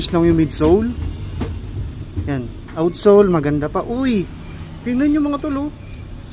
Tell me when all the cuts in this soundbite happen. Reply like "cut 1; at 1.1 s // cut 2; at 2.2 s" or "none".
none